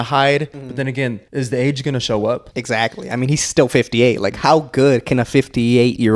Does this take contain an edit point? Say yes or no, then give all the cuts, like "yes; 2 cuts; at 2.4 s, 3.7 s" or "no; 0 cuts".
yes; 2 cuts; at 0.9 s, 2.5 s